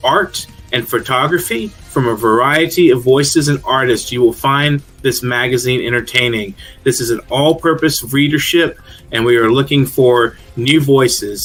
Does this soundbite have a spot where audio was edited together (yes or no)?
no